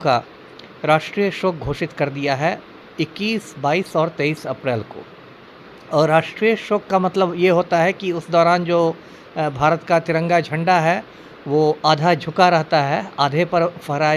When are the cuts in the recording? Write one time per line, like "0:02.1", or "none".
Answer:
none